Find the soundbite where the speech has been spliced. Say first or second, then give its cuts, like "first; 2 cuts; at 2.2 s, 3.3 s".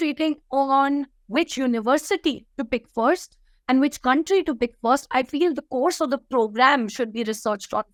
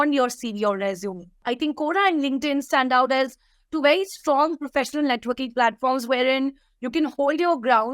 second; 1 cut; at 1.4 s